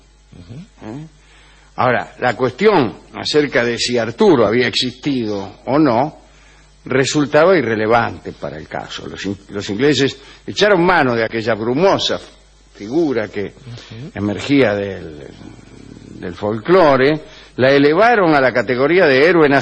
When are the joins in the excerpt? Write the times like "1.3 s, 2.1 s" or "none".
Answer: 13.6 s